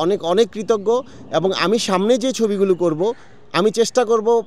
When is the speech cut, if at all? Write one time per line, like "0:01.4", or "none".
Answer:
none